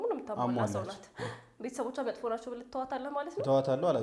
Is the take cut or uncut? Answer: uncut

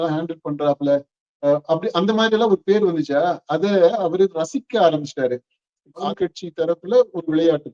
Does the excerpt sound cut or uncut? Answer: cut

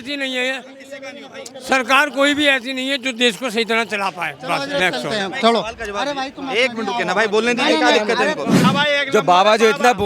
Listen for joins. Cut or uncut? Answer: cut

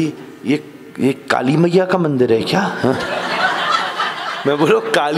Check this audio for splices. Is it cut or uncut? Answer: uncut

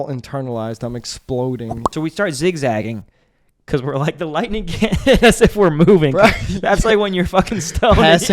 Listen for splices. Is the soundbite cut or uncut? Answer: cut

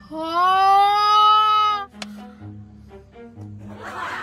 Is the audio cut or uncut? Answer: uncut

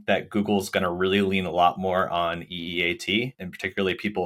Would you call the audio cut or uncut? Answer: uncut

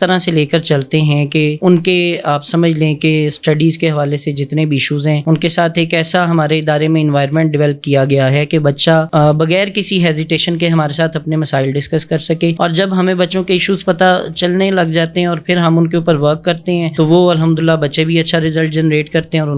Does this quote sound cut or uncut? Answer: uncut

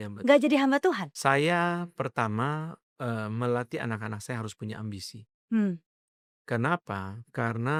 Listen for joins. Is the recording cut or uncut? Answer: uncut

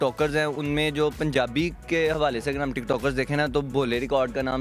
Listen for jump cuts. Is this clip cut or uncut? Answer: uncut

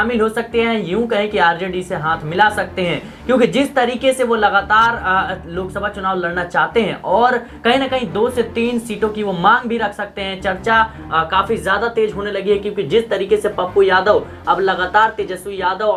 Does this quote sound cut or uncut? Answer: uncut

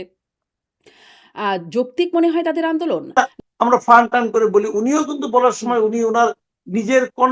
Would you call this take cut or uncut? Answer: cut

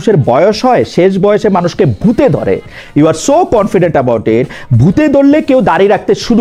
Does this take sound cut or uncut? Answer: uncut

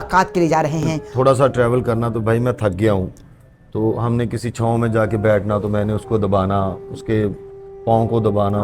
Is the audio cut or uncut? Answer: cut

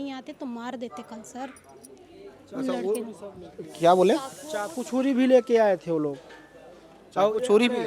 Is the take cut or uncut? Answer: uncut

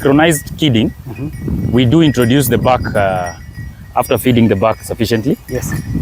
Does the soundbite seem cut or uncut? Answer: uncut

